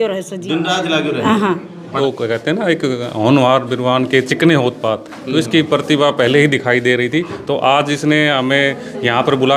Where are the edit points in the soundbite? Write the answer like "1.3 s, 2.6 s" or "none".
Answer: 1.9 s